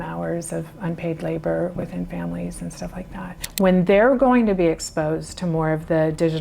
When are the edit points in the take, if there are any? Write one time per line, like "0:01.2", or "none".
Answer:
0:03.4